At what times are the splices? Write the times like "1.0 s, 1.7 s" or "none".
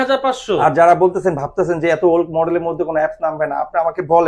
none